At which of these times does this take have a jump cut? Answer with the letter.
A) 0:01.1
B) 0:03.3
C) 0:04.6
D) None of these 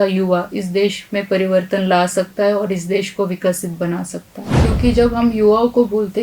C